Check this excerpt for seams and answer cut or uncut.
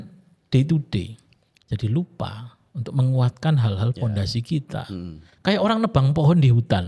uncut